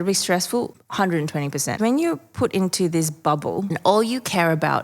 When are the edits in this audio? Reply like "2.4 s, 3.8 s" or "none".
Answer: 1.3 s, 3.8 s

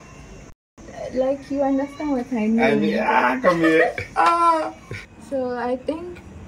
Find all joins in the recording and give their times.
4.8 s

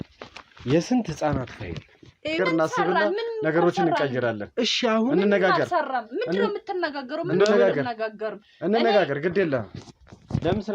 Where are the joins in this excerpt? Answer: 2.4 s

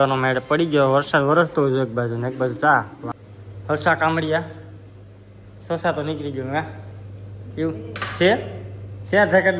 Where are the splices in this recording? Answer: 3.0 s

